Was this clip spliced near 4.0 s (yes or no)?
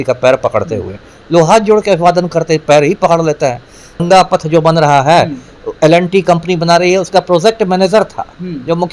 yes